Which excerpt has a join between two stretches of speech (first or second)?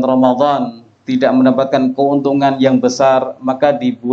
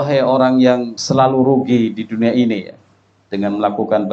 second